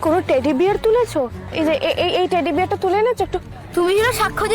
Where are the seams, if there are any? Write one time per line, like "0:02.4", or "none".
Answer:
0:01.5
0:03.6